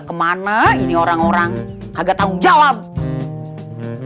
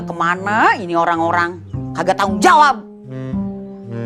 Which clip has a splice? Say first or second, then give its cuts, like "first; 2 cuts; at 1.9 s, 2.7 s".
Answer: first; 1 cut; at 2.9 s